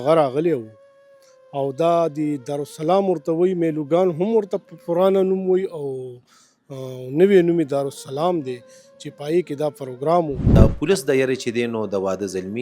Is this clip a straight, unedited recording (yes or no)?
no